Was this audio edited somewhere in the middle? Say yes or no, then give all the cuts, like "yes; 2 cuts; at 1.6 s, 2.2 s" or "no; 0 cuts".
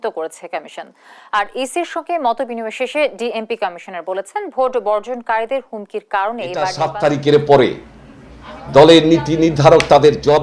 yes; 1 cut; at 6.8 s